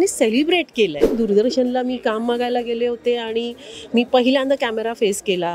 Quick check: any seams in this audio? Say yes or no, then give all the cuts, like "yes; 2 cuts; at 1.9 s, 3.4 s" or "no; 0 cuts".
yes; 1 cut; at 1.1 s